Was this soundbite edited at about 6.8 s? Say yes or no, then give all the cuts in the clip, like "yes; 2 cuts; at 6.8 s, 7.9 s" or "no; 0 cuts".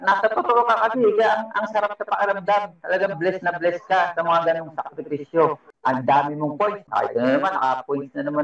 yes; 2 cuts; at 5.7 s, 6.8 s